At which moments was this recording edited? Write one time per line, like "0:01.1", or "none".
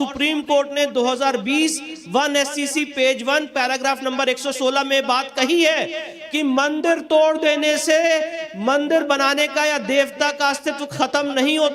none